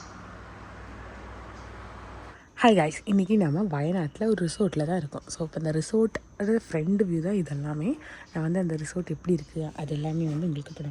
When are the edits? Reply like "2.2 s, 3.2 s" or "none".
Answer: 2.4 s